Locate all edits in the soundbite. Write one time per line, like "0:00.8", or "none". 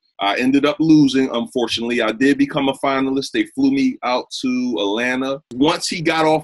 0:05.5